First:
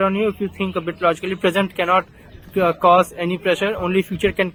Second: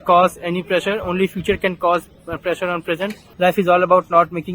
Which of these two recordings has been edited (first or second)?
second